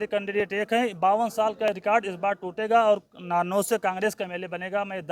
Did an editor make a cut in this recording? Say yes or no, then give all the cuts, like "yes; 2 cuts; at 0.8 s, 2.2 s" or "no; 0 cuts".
no; 0 cuts